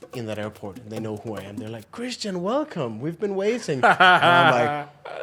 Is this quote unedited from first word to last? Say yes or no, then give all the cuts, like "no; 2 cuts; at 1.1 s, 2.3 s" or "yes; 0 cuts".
yes; 0 cuts